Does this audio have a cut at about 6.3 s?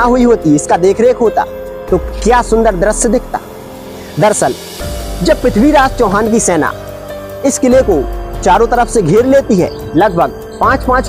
no; 1 cut; at 9.8 s

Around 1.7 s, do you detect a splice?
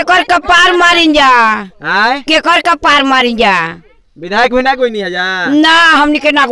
no; 0 cuts

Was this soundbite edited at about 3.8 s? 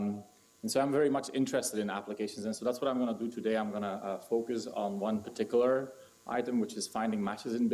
yes; 1 cut; at 3.8 s

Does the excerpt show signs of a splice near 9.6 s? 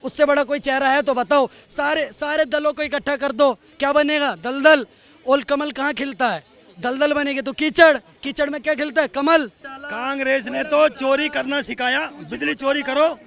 yes; 1 cut; at 9.6 s

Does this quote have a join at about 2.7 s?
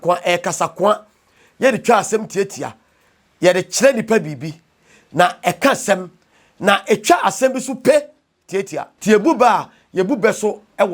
no; 1 cut; at 8.8 s

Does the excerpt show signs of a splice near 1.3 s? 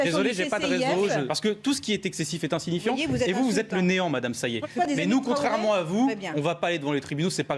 yes; 2 cuts; at 1.3 s, 4.4 s

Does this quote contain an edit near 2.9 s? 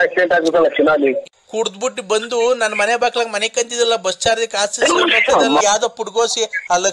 no; 2 cuts; at 1.3 s, 5.6 s

